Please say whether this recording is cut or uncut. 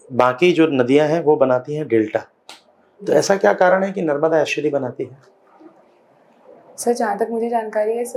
uncut